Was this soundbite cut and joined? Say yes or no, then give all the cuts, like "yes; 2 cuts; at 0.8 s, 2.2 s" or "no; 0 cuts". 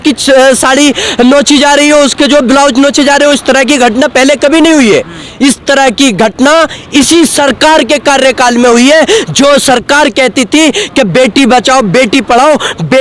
no; 0 cuts